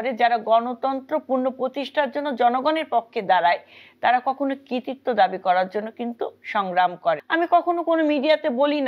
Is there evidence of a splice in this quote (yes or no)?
yes